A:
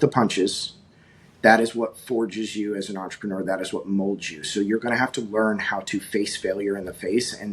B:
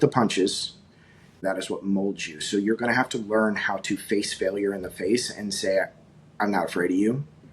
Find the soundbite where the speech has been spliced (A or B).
B